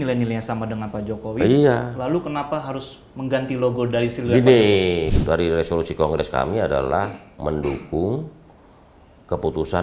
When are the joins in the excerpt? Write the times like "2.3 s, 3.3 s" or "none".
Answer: 5.1 s